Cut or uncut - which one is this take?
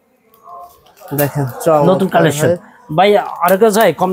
uncut